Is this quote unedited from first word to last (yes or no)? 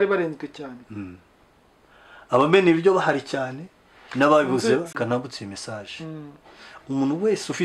no